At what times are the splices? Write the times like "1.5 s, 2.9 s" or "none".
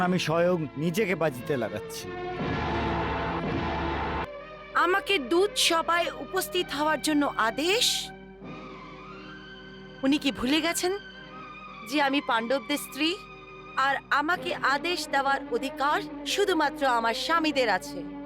4.2 s